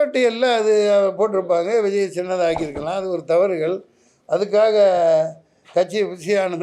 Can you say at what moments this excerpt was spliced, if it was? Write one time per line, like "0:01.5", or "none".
none